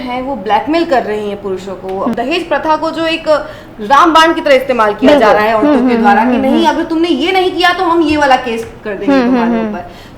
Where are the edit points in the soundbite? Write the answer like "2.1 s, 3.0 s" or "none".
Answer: 2.1 s